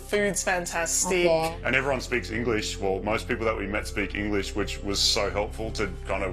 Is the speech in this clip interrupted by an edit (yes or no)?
yes